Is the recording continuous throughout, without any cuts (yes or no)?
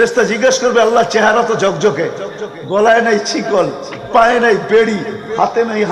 yes